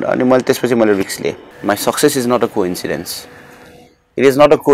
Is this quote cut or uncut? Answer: cut